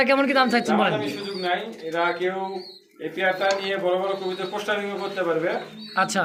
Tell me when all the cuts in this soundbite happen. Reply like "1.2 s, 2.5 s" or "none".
none